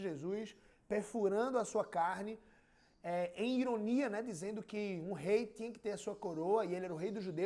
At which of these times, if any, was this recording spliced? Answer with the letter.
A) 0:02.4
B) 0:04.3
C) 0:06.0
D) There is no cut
D